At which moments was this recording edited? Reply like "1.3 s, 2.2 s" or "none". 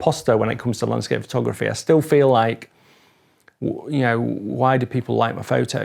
none